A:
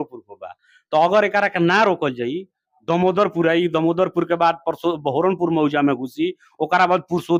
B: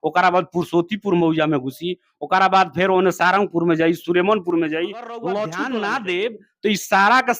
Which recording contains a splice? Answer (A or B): B